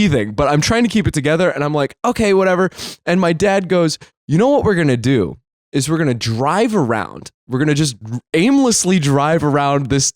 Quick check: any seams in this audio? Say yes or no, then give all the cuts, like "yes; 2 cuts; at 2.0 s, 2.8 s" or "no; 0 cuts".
yes; 1 cut; at 4.1 s